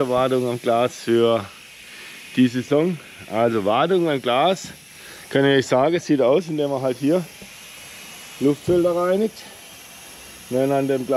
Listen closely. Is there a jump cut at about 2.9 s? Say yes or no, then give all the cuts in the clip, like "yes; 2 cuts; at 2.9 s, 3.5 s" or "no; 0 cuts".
no; 0 cuts